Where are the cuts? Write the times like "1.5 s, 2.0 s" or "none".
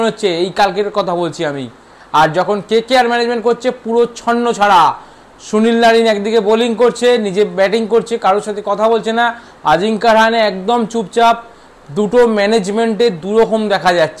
none